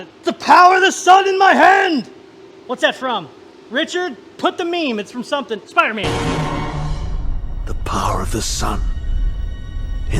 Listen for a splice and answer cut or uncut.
uncut